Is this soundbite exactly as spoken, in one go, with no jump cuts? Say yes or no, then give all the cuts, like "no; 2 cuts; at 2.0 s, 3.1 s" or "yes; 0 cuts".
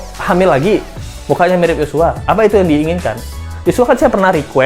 yes; 0 cuts